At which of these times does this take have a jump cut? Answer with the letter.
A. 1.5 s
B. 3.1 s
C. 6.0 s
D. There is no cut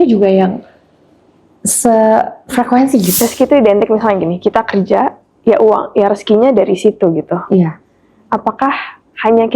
B